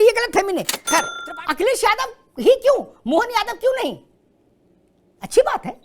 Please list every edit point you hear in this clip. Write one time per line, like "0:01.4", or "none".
0:01.1